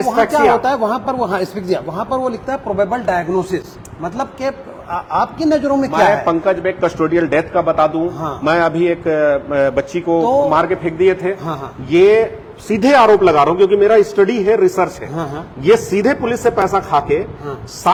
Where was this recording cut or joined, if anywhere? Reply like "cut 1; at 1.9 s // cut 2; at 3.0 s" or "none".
none